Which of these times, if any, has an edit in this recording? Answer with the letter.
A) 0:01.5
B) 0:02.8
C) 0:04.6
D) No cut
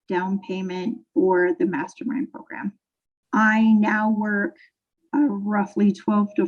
B